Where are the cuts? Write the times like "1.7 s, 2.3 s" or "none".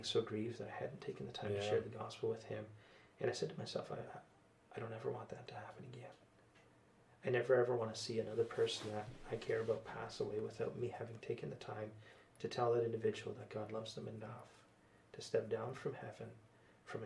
none